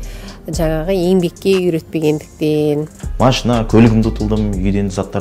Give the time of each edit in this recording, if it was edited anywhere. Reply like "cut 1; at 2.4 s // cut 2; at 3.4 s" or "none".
cut 1; at 3.0 s